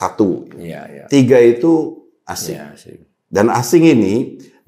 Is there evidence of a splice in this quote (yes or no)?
no